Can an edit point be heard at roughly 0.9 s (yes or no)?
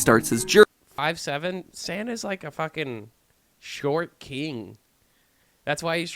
yes